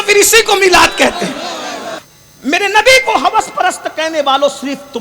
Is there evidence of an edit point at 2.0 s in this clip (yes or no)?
yes